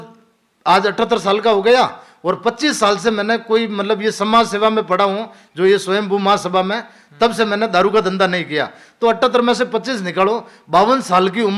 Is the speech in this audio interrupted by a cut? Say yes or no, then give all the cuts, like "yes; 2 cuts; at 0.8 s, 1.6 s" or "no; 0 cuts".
no; 0 cuts